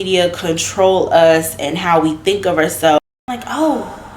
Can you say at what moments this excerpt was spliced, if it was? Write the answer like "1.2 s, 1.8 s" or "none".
3.0 s